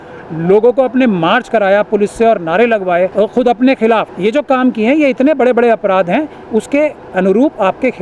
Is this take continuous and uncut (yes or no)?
no